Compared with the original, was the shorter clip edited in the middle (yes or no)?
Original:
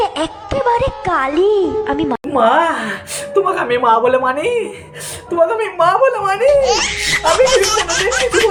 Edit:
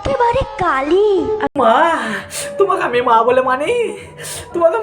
yes